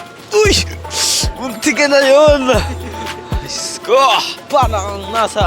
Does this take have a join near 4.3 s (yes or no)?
yes